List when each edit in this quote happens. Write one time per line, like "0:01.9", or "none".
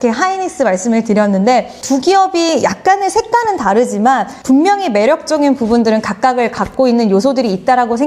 none